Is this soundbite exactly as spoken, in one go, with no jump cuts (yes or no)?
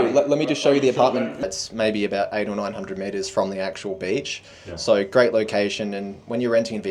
no